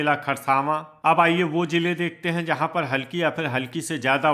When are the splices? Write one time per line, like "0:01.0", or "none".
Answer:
0:00.9